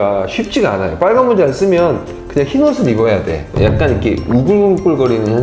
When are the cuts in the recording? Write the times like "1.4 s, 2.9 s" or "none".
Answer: 3.5 s